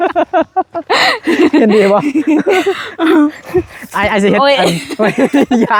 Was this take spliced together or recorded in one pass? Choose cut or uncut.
uncut